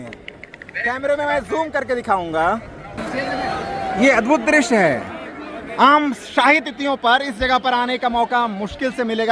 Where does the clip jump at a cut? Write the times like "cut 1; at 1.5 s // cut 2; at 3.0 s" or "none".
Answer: cut 1; at 3.0 s